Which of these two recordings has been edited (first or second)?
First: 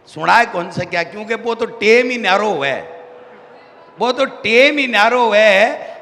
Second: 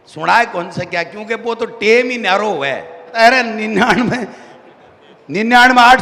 second